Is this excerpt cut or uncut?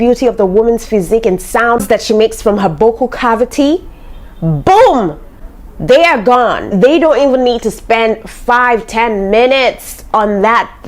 cut